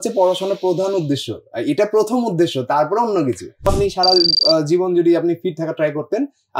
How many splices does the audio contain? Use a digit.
1